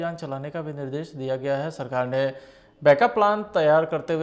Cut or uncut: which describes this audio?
uncut